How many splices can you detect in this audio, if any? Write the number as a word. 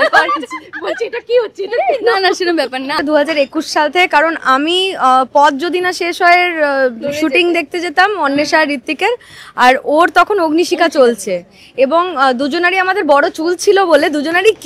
one